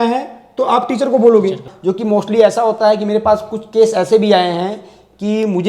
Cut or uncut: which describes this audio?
cut